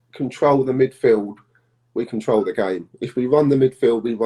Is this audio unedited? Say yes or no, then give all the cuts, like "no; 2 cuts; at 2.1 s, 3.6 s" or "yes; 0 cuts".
yes; 0 cuts